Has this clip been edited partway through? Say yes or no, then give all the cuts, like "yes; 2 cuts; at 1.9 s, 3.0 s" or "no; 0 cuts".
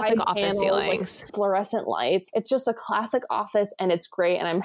yes; 2 cuts; at 1.3 s, 2.3 s